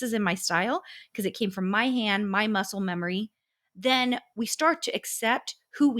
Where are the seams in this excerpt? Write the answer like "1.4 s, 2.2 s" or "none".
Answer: none